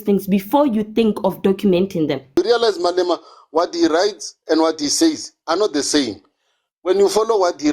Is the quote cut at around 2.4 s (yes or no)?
yes